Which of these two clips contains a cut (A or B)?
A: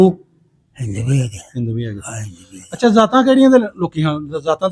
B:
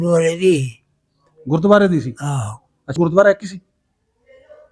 B